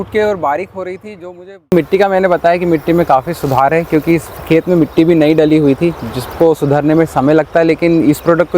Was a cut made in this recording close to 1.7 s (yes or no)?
yes